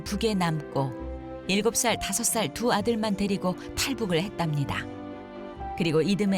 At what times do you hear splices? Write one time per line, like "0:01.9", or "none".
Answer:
none